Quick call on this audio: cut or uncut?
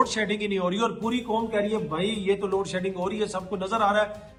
uncut